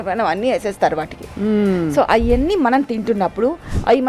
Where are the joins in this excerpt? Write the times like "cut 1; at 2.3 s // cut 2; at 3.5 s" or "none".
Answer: none